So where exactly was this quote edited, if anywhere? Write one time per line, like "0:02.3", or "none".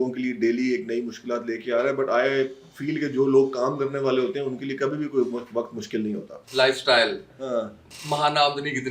0:06.3